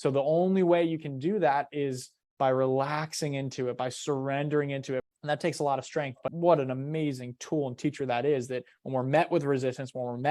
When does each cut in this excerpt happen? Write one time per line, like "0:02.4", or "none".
0:05.1
0:06.3